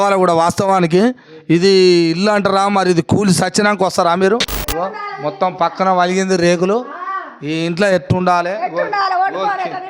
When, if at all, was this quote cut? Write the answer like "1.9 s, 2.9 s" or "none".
4.6 s